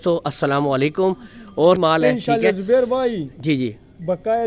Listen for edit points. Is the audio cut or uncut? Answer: cut